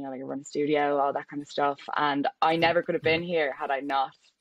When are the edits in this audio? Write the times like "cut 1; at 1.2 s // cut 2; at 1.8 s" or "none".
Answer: none